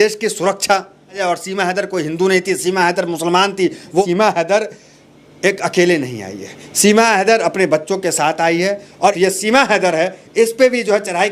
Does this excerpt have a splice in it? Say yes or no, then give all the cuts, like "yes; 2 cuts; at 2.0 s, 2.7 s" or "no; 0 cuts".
yes; 3 cuts; at 1.2 s, 4.0 s, 9.2 s